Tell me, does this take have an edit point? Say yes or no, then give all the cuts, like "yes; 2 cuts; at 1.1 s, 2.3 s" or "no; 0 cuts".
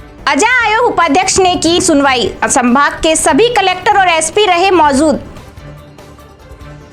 no; 0 cuts